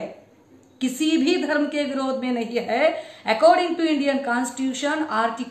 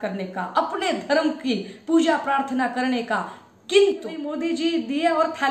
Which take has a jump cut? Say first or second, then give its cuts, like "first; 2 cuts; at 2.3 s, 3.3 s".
second; 1 cut; at 4.2 s